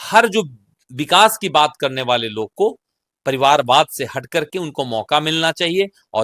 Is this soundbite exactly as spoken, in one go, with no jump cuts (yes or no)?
yes